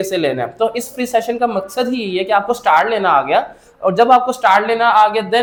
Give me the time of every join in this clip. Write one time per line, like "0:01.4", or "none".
none